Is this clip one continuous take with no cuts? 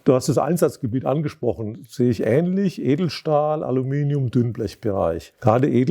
yes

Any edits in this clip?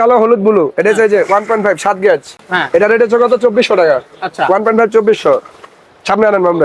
no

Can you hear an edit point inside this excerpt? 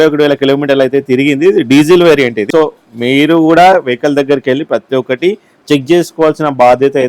yes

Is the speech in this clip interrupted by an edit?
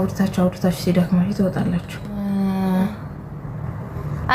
no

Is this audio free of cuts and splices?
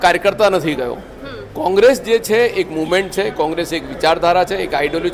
yes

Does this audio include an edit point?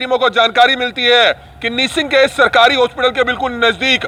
no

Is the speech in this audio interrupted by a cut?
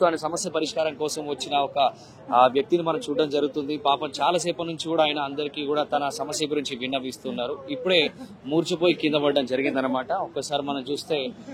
no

